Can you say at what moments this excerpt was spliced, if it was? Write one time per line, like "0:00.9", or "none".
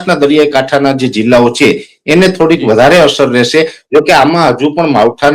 none